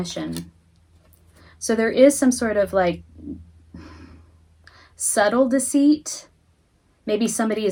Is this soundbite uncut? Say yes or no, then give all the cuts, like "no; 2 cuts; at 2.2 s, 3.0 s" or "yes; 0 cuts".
yes; 0 cuts